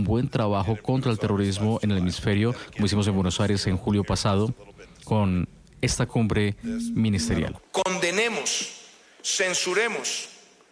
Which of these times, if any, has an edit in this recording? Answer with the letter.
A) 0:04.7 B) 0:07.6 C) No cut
B